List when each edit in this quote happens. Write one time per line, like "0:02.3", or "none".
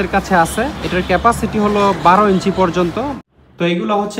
0:03.2